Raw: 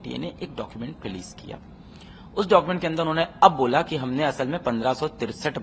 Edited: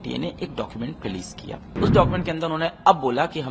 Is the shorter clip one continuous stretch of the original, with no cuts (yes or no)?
no